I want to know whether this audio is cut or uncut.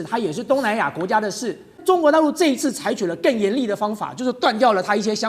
cut